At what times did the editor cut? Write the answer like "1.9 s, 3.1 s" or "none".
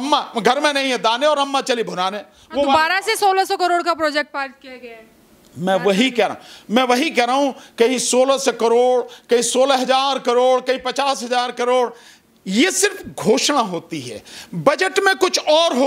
none